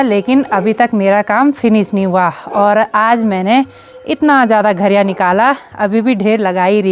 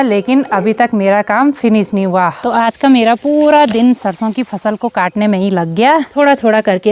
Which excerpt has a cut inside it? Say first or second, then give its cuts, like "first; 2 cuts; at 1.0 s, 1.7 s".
second; 2 cuts; at 2.4 s, 6.1 s